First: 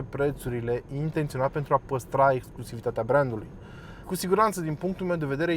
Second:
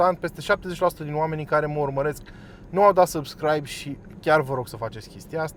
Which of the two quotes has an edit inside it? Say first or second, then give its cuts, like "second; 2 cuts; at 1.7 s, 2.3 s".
first; 1 cut; at 4.0 s